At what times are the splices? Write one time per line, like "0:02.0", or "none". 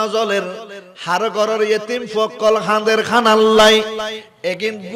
none